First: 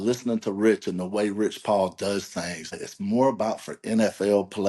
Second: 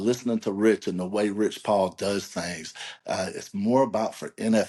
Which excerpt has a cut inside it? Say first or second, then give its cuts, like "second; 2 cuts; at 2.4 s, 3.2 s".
first; 1 cut; at 2.9 s